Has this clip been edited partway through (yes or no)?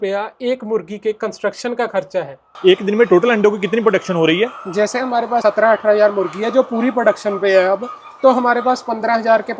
yes